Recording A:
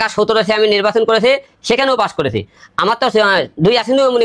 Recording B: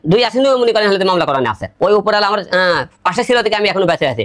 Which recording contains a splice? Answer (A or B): B